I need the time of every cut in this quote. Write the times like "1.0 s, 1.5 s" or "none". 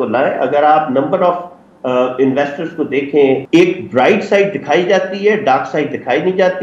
3.4 s